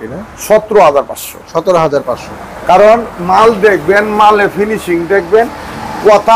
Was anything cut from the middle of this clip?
no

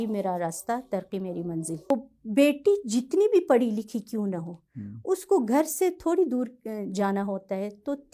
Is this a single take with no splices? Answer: no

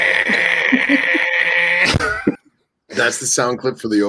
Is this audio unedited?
no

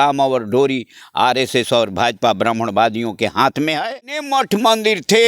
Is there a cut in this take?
yes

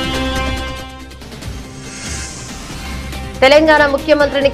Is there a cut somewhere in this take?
no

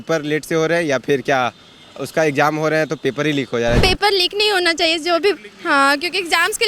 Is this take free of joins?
no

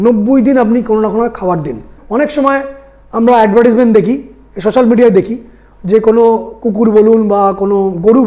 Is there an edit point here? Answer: yes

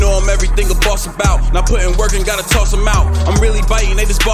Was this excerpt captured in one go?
yes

